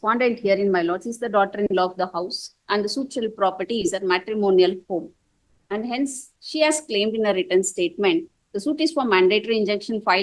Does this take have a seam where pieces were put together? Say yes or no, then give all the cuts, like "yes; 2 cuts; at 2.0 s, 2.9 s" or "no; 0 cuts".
no; 0 cuts